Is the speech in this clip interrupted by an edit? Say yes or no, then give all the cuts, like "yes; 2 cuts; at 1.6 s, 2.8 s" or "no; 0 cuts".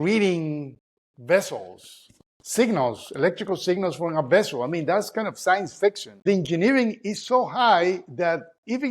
yes; 1 cut; at 6.2 s